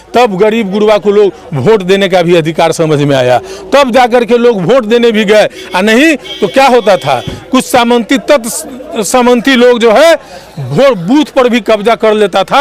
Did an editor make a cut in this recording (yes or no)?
no